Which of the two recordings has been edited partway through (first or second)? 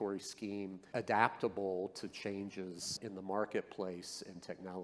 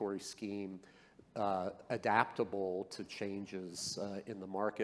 first